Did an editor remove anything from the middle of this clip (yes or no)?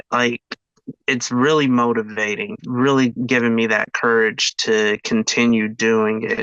yes